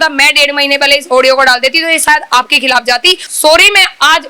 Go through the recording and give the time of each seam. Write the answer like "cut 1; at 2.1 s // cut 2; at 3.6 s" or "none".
cut 1; at 3.3 s